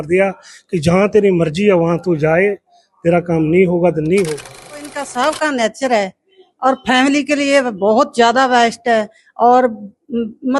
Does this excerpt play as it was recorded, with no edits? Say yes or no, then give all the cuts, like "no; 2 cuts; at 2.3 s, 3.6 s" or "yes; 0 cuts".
no; 1 cut; at 5.0 s